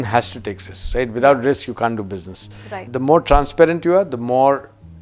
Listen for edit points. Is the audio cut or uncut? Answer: cut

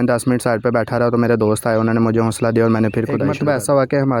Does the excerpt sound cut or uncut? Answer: cut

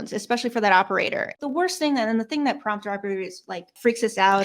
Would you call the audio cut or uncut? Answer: cut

